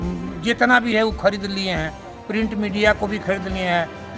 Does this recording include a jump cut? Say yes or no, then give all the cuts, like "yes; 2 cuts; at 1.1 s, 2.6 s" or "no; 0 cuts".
no; 0 cuts